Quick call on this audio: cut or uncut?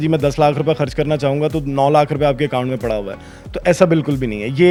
uncut